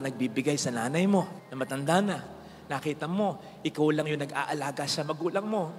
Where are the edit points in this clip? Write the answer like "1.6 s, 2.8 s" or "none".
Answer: none